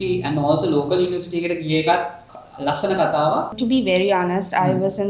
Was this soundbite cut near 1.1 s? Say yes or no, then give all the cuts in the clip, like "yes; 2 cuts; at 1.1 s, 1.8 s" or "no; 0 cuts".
no; 1 cut; at 3.6 s